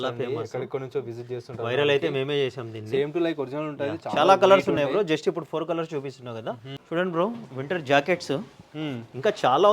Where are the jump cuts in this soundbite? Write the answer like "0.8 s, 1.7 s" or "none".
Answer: 6.7 s